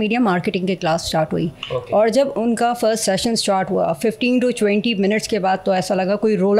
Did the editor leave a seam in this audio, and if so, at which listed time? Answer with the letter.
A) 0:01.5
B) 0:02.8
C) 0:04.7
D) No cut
D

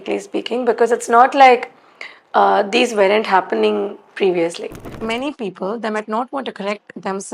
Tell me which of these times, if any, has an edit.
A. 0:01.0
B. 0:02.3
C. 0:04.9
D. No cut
C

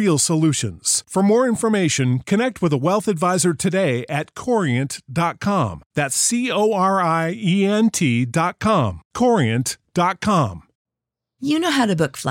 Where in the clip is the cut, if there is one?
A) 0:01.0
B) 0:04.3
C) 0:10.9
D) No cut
C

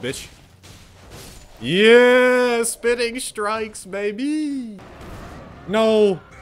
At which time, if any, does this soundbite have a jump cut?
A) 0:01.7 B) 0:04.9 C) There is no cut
B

